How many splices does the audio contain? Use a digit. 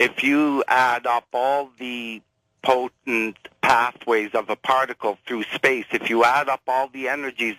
1